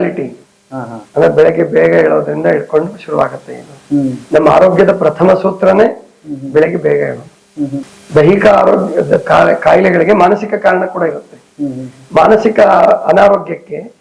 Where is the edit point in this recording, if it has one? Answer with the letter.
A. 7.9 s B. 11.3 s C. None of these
A